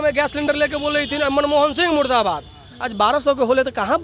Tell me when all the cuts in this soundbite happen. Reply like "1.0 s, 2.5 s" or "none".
none